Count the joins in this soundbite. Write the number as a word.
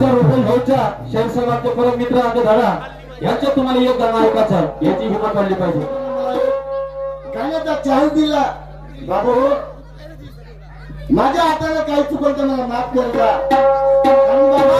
one